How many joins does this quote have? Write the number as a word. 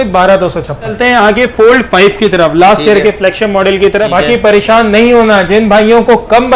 two